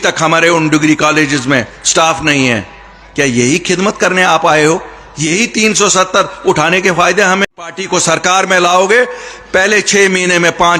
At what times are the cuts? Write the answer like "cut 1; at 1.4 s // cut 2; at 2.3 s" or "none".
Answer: cut 1; at 7.6 s